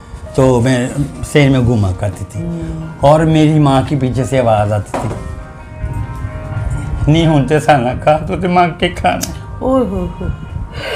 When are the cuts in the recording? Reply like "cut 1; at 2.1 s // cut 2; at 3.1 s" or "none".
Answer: none